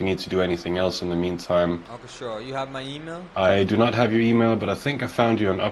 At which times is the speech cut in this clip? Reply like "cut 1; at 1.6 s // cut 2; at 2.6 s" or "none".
cut 1; at 1.9 s